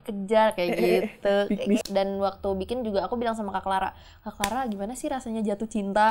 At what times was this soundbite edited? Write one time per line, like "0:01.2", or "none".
0:01.8